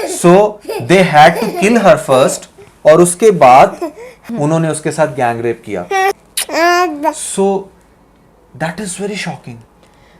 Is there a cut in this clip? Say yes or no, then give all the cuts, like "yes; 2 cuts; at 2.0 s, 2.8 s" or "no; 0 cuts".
no; 0 cuts